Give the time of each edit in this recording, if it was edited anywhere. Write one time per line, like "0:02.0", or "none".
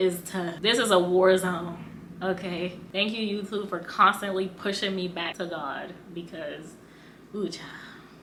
none